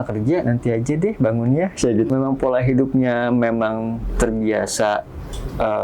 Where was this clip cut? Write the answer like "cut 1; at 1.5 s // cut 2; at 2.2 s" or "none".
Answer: cut 1; at 2.1 s